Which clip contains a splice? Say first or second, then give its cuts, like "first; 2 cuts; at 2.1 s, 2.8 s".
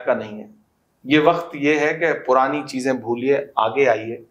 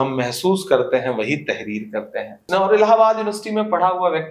second; 1 cut; at 2.4 s